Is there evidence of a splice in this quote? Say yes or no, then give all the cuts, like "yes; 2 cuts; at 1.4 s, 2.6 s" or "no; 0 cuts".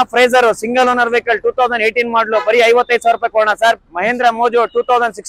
yes; 1 cut; at 3.8 s